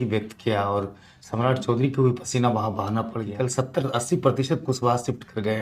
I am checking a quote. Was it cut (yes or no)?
yes